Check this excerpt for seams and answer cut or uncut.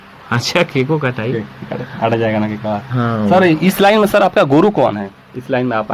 uncut